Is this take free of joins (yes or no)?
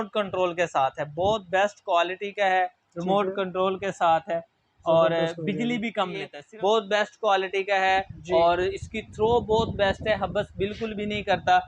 no